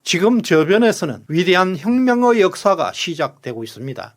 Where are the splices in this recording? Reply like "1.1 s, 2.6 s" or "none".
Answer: 1.1 s

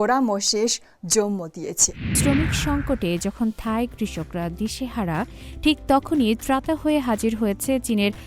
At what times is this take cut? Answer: 2.2 s

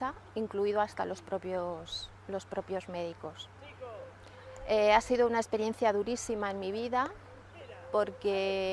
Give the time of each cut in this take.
none

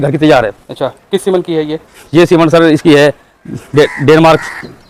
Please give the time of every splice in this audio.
none

